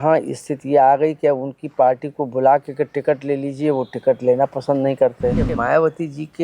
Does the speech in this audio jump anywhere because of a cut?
yes; 1 cut; at 5.5 s

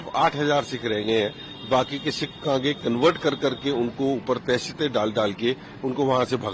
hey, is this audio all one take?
yes; 0 cuts

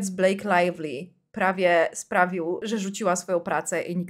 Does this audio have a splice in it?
yes; 1 cut; at 2.6 s

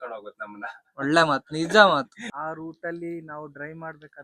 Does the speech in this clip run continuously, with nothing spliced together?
no; 1 cut; at 2.2 s

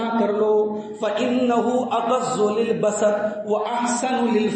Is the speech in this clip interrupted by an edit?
no; 0 cuts

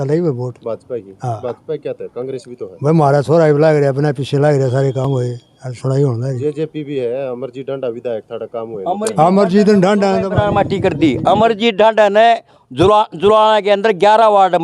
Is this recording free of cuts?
yes; 0 cuts

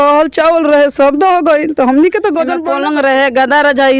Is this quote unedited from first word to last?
no; 1 cut; at 2.7 s

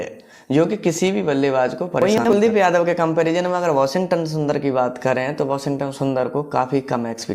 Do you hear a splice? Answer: yes; 1 cut; at 2.2 s

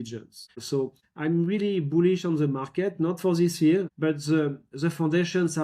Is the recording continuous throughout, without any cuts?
no; 2 cuts; at 0.9 s, 3.9 s

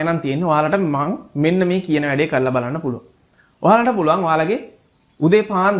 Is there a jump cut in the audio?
no; 0 cuts

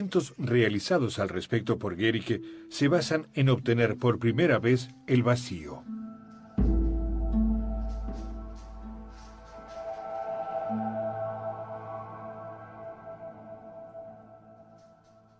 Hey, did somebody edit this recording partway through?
no; 0 cuts

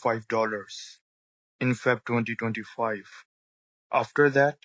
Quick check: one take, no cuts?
yes; 0 cuts

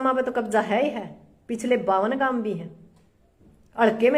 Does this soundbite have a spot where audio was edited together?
no; 0 cuts

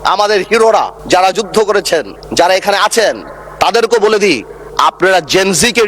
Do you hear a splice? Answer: no; 0 cuts

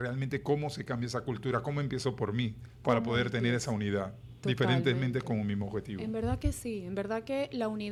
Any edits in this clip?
no; 0 cuts

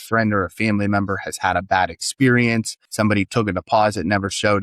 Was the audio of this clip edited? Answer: yes; 1 cut; at 2.8 s

